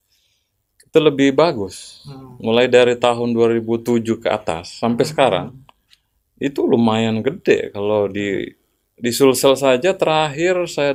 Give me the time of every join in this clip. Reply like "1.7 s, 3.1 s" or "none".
none